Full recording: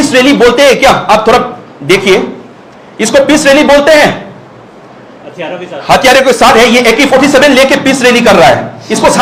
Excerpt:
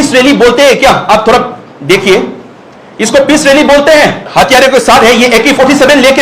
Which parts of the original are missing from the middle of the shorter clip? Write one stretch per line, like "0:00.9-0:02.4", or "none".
0:04.2-0:05.8